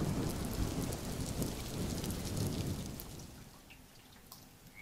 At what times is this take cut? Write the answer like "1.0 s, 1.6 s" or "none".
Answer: none